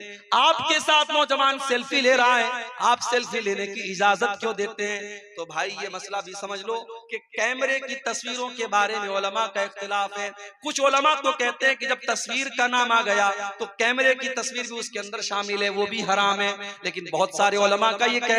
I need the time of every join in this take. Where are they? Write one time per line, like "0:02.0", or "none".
none